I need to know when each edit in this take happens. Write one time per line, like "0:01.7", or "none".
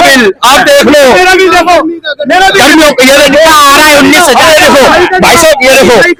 none